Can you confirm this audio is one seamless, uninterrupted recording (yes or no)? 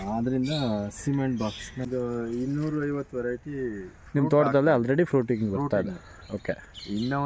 no